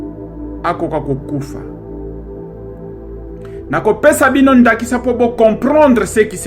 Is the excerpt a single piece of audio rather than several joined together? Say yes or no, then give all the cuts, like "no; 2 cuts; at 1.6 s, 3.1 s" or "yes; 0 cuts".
no; 2 cuts; at 1.4 s, 3.7 s